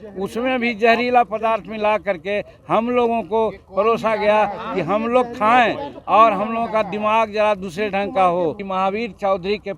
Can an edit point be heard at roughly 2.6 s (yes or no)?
no